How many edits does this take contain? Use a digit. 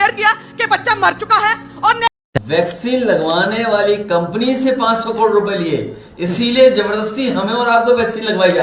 1